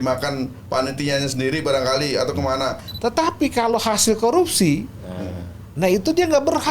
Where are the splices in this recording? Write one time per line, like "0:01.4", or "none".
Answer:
0:02.9